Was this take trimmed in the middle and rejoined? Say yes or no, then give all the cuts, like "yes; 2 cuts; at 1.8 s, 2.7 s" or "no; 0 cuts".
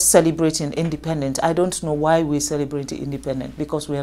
no; 0 cuts